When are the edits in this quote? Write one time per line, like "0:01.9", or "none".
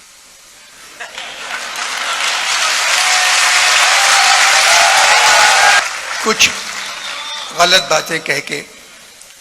0:05.8